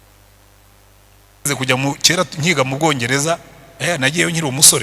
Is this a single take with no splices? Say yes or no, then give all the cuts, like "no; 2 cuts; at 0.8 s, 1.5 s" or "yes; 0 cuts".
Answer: no; 1 cut; at 1.5 s